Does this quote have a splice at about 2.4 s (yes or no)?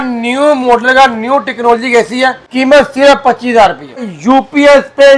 yes